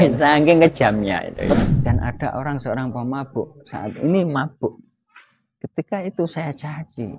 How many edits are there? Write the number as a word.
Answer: one